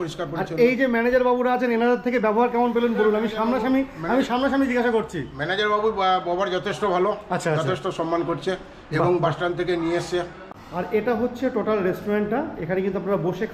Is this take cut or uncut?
cut